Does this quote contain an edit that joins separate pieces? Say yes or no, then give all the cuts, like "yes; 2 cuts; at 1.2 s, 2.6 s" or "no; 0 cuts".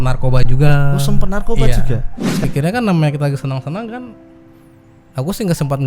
yes; 1 cut; at 2.4 s